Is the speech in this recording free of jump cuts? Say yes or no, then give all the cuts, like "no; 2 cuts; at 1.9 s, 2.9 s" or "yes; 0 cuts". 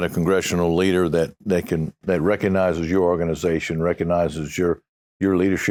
yes; 0 cuts